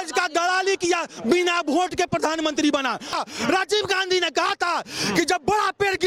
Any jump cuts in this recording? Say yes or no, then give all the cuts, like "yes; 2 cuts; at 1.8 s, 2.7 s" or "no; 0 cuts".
yes; 1 cut; at 3.1 s